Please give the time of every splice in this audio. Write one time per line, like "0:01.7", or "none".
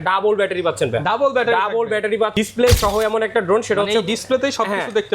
0:02.3